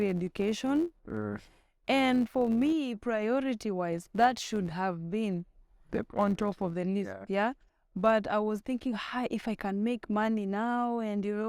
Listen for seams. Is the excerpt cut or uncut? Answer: uncut